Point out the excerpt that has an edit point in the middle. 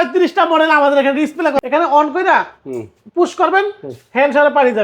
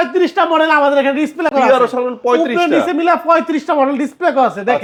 first; 1 cut; at 1.6 s

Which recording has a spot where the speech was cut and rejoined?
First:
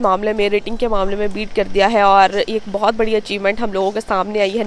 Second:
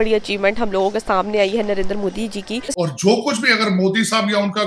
second; 1 cut; at 2.7 s

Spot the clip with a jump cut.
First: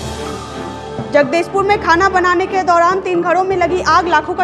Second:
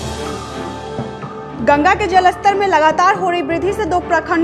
first; 1 cut; at 1.0 s

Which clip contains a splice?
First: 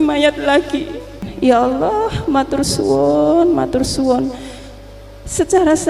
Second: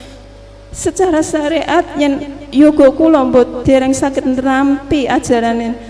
first; 1 cut; at 1.1 s

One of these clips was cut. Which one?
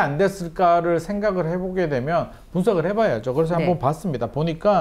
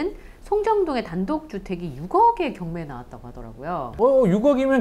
second; 1 cut; at 3.9 s

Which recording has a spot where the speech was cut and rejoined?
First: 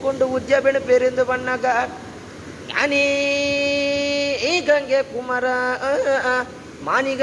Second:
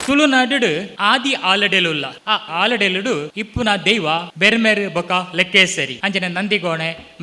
second; 5 cuts; at 0.9 s, 2.5 s, 3.4 s, 4.3 s, 5.9 s

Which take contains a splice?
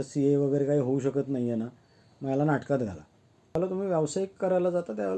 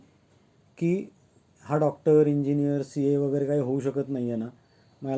first; 1 cut; at 3.5 s

